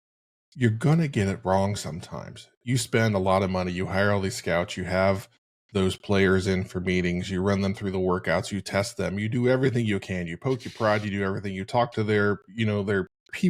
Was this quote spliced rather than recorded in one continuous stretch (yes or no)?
no